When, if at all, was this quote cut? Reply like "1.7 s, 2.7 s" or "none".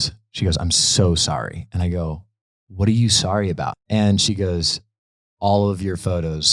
3.8 s